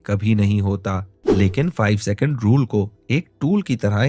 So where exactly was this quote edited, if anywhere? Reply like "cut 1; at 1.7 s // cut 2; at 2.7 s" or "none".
cut 1; at 1.1 s